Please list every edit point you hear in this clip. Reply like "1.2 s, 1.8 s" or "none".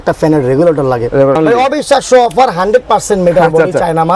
1.4 s